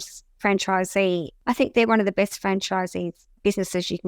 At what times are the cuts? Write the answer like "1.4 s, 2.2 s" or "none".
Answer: 1.3 s